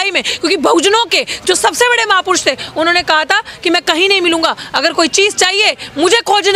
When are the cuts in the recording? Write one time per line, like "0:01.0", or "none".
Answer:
none